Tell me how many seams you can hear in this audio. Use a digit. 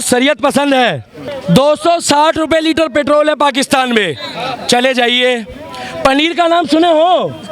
1